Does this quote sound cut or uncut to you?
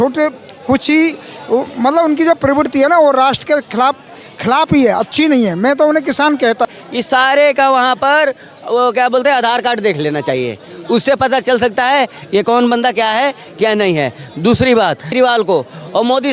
cut